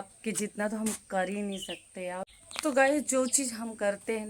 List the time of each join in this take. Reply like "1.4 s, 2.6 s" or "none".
2.3 s